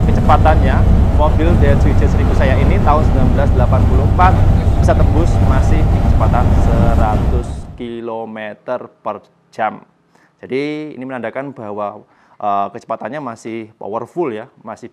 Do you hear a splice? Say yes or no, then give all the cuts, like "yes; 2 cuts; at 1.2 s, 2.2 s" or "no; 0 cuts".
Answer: no; 0 cuts